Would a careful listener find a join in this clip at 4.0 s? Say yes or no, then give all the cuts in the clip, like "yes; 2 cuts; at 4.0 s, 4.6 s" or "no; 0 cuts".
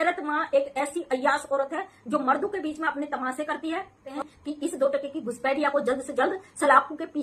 yes; 1 cut; at 4.0 s